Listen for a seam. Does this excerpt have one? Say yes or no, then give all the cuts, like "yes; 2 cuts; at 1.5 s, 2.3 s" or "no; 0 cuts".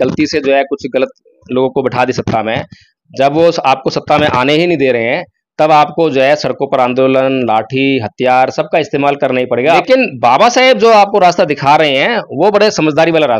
yes; 1 cut; at 9.8 s